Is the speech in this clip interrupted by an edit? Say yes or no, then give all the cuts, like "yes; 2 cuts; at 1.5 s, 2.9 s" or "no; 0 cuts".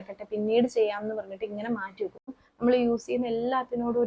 yes; 1 cut; at 2.4 s